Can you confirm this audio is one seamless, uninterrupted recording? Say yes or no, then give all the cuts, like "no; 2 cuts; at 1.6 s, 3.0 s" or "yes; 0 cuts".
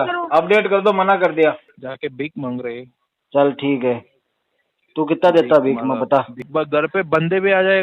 no; 2 cuts; at 1.7 s, 6.4 s